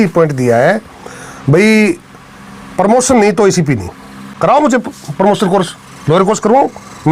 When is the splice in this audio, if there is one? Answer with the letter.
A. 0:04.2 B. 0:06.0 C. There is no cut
A